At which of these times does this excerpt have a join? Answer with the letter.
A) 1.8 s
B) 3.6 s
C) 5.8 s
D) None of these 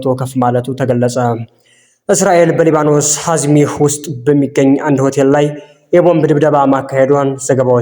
A